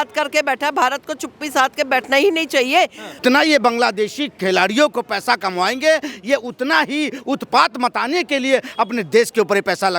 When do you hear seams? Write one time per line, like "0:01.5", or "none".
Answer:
0:03.2